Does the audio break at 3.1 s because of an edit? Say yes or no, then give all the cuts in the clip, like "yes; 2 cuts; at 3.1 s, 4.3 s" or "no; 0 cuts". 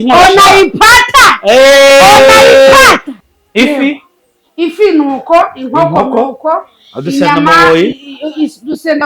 yes; 1 cut; at 3.1 s